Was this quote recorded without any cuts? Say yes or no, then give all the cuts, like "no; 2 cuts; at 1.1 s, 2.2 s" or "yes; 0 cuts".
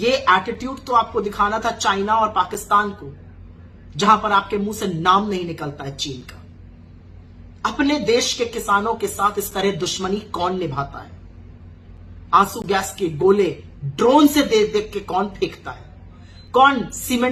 yes; 0 cuts